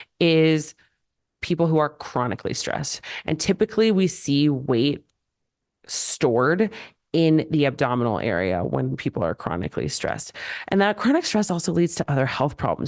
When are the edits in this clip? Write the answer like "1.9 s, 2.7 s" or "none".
none